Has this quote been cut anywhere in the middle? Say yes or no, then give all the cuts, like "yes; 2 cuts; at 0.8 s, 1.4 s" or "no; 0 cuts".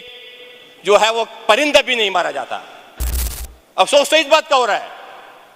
no; 0 cuts